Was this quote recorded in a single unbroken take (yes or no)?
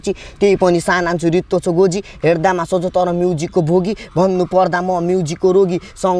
yes